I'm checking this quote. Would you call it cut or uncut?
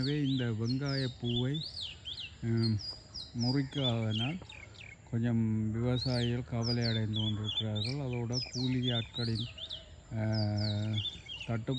uncut